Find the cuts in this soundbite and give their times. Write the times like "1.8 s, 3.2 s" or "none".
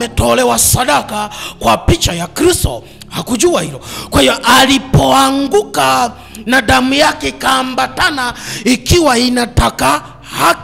none